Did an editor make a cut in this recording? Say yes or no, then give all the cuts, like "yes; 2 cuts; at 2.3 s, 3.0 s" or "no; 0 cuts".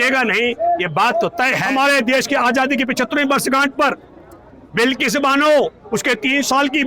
yes; 1 cut; at 1.6 s